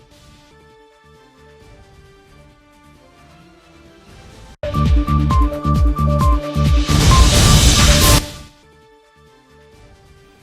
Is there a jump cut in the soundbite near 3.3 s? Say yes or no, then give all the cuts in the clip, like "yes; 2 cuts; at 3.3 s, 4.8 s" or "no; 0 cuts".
no; 2 cuts; at 4.5 s, 8.2 s